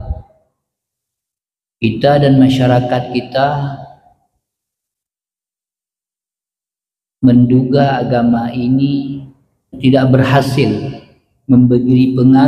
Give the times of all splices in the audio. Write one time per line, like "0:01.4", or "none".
0:09.7